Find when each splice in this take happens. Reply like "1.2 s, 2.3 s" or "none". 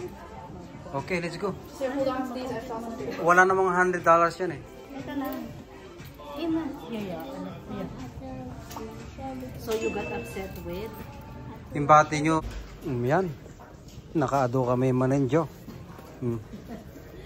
12.4 s